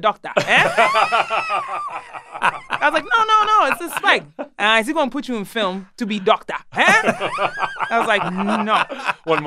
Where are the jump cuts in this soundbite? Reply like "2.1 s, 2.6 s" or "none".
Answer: none